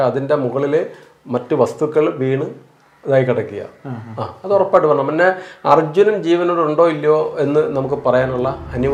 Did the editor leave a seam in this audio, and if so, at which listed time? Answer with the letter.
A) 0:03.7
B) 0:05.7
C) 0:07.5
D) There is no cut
D